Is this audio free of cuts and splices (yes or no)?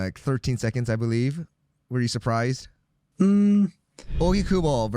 no